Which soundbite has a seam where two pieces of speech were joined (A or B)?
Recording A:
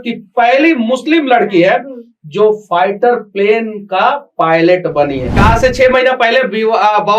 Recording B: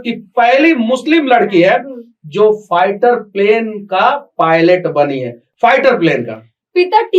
A